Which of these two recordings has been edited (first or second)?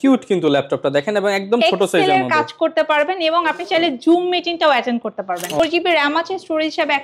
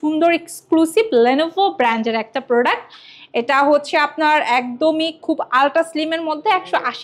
first